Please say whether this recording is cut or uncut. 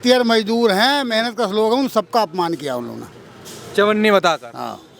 uncut